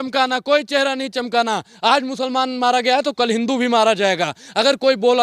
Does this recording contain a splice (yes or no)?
no